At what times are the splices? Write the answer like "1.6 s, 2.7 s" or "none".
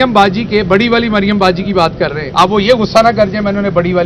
2.2 s